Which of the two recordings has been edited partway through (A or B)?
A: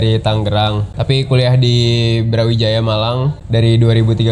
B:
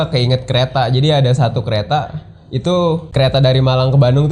A